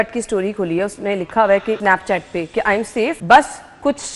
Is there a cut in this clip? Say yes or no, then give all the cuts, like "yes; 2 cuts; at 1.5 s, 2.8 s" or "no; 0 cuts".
yes; 2 cuts; at 1.8 s, 3.2 s